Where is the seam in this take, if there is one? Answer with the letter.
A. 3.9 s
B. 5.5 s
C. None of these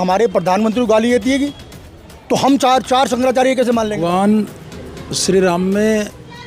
A